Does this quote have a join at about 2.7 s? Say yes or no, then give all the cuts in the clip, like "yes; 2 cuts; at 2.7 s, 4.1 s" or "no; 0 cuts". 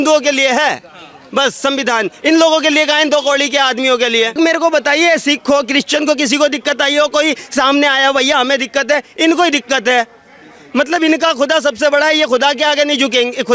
no; 1 cut; at 4.4 s